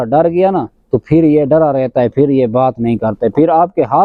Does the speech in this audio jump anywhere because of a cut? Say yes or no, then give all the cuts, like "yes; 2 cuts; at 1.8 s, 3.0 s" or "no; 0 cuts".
no; 0 cuts